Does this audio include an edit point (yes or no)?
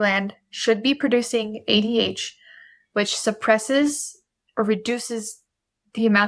no